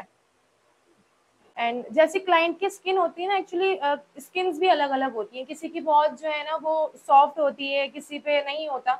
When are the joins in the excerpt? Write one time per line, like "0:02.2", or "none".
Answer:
0:01.4